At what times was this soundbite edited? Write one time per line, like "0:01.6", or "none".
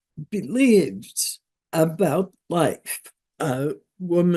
0:03.1